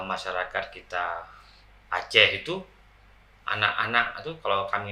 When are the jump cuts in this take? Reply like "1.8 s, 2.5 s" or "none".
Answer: none